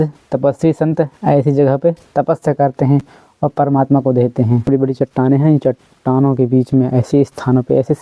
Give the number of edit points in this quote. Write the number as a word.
zero